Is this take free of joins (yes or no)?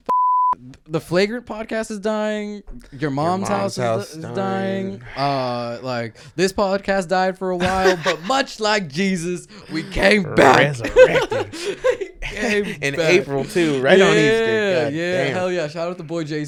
yes